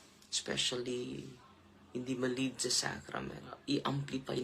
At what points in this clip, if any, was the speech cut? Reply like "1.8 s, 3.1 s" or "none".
3.5 s